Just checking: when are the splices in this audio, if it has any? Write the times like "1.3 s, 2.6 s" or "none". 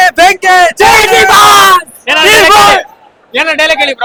none